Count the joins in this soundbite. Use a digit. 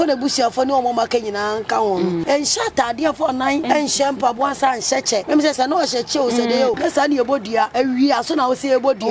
5